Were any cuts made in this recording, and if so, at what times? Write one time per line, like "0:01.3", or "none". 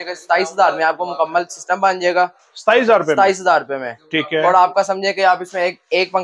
none